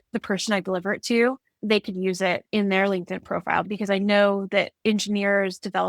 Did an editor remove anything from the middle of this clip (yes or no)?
yes